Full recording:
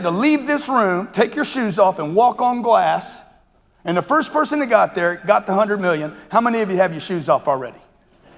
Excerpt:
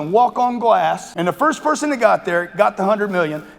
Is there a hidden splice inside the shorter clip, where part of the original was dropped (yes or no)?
yes